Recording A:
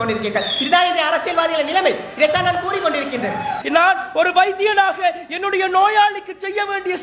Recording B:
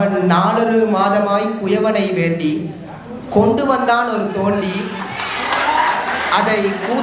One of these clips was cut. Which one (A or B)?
A